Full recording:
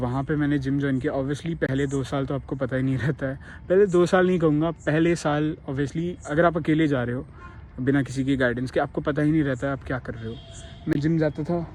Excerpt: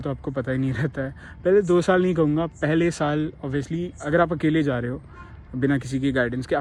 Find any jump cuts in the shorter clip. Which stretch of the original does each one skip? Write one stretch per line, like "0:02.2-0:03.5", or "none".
none